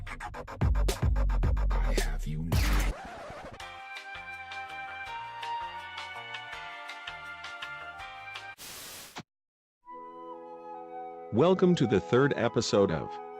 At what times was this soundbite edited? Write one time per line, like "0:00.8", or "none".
0:02.5

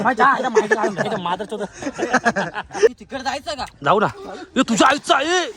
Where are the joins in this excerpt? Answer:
0:02.9

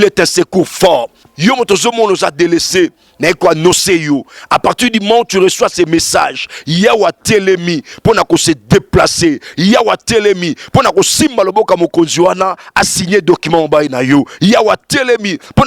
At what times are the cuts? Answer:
0:01.2

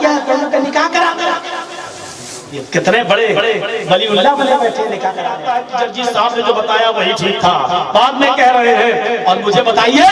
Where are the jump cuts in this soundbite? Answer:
0:05.4

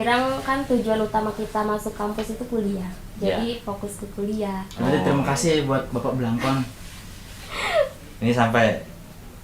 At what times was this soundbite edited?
none

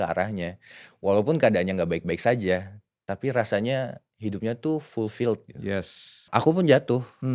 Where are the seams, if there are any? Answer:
0:06.3

